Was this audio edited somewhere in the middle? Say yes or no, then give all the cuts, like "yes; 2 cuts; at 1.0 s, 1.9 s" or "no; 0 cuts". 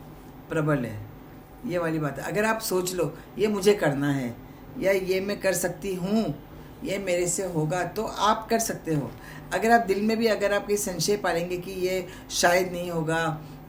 no; 0 cuts